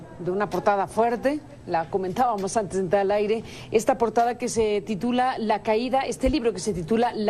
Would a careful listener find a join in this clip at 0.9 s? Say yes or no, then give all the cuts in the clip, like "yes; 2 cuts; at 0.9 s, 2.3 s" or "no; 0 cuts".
yes; 1 cut; at 0.9 s